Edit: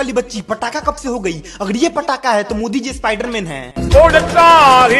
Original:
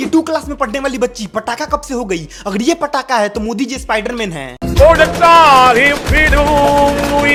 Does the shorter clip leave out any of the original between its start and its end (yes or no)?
no